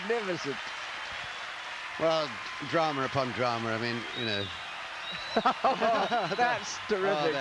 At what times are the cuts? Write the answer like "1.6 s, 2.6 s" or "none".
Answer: none